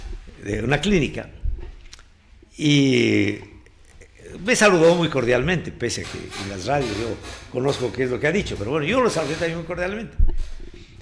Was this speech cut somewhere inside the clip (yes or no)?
no